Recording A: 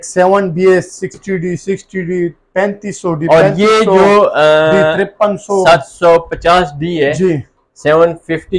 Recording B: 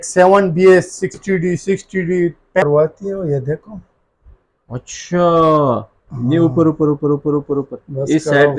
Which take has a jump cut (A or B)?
B